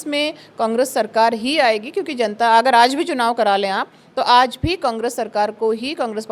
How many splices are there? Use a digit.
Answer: 0